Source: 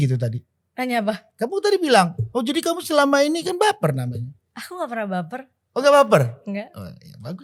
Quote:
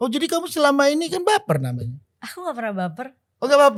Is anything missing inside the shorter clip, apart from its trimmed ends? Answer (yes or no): no